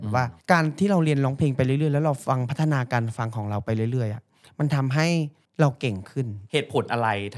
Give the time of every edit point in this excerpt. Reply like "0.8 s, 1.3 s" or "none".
6.3 s